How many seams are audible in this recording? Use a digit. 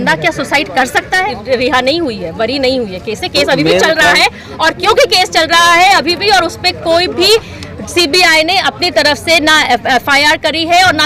1